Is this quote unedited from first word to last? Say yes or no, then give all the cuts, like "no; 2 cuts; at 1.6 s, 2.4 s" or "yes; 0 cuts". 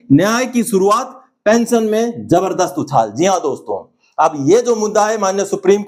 yes; 0 cuts